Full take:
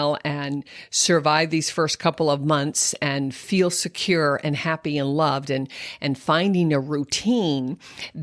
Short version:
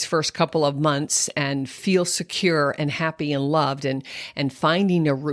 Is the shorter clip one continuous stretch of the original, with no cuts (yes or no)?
yes